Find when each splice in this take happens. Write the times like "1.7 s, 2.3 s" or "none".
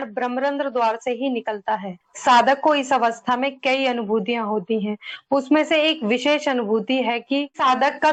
none